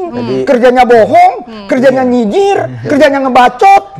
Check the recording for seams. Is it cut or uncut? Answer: uncut